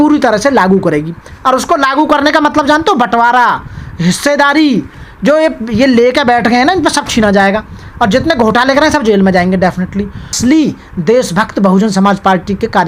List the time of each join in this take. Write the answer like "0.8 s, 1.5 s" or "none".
10.4 s